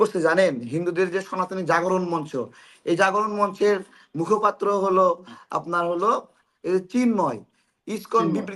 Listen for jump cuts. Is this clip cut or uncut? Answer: uncut